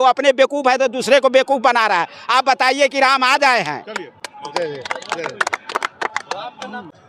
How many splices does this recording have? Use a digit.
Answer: 0